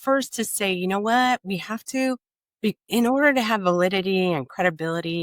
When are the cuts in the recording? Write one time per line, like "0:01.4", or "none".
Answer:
none